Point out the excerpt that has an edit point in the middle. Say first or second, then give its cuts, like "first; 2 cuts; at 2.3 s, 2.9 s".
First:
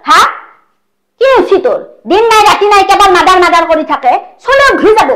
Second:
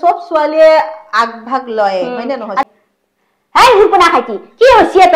second; 1 cut; at 2.6 s